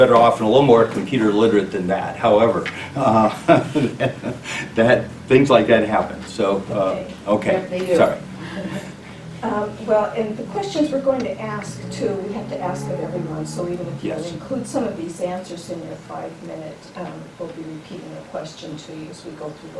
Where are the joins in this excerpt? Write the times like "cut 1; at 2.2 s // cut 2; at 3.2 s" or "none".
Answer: cut 1; at 17.7 s